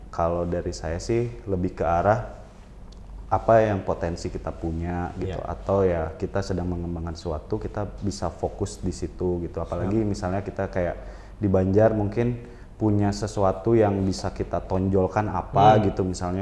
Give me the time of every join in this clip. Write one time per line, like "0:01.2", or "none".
none